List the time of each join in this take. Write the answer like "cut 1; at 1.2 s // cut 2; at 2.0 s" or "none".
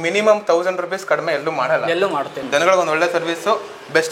cut 1; at 2.4 s